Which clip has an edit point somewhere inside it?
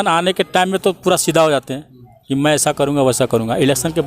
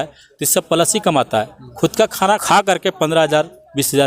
second; 1 cut; at 2.4 s

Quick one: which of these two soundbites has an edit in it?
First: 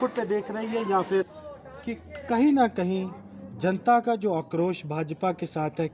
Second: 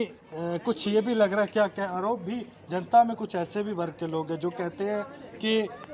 first; 1 cut; at 1.4 s

